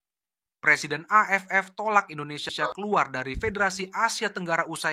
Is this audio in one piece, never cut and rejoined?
no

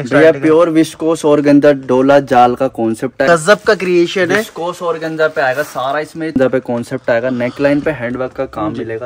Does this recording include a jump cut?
yes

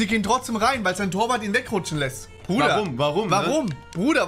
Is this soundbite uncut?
yes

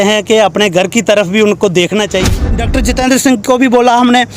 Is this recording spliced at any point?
yes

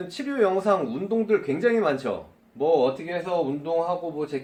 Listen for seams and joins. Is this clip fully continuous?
yes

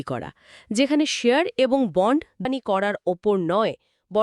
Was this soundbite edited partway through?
yes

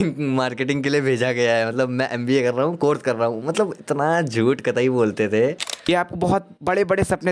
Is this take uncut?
no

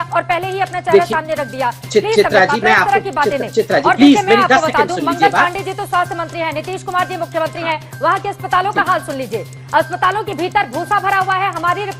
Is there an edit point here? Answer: no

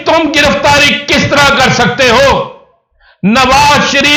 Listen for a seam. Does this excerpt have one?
no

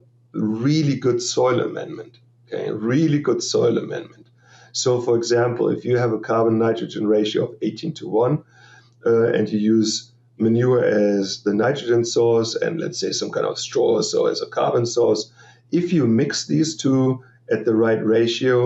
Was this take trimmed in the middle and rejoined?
no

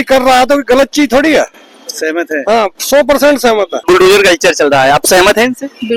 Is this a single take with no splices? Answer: yes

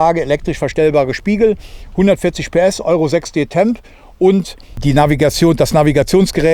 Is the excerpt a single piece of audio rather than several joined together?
no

